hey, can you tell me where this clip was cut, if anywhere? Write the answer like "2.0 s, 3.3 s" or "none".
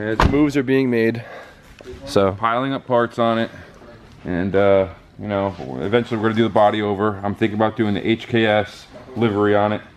none